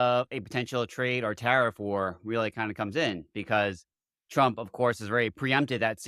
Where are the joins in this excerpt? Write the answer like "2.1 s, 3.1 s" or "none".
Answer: none